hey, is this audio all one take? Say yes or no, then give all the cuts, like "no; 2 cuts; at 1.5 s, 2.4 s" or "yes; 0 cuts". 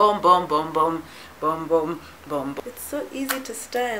no; 1 cut; at 2.6 s